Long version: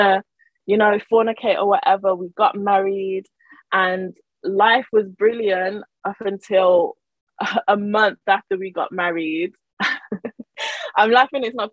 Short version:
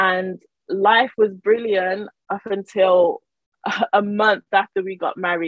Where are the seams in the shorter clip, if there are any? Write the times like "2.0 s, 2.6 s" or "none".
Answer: none